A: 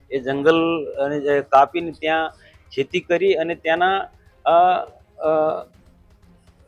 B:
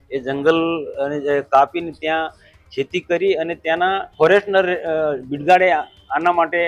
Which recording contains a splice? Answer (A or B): B